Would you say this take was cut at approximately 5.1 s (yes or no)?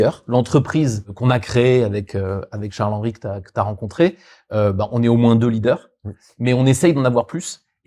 no